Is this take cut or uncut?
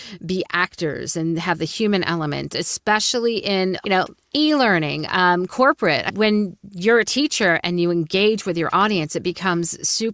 cut